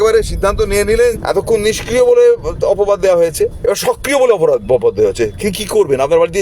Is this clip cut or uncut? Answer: cut